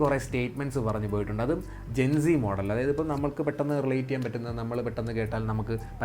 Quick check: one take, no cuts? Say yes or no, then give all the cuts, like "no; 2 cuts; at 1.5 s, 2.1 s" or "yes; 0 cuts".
yes; 0 cuts